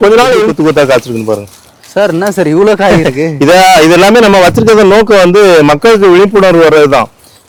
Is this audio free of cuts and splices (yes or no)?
yes